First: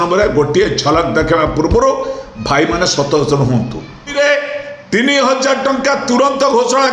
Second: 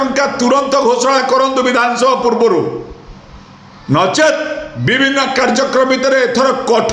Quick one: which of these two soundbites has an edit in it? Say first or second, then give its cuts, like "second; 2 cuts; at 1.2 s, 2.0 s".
first; 1 cut; at 4.1 s